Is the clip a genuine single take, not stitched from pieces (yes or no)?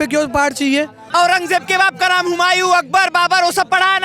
no